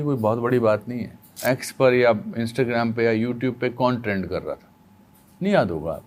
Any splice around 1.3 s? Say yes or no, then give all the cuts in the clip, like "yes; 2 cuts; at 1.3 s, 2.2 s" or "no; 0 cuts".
yes; 1 cut; at 1.3 s